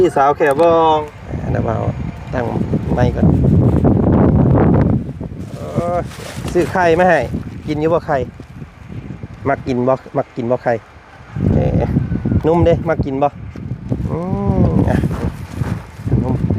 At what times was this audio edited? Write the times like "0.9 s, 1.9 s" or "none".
1.0 s